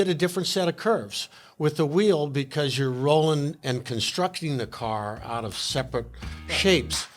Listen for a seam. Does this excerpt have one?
no; 0 cuts

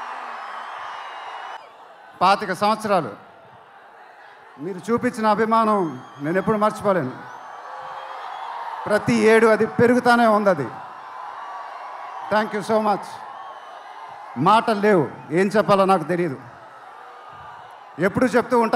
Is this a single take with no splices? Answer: no; 1 cut; at 1.6 s

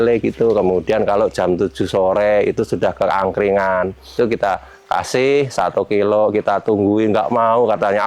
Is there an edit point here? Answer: yes; 1 cut; at 4.1 s

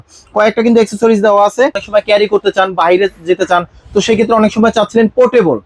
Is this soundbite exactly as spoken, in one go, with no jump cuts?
no; 1 cut; at 1.8 s

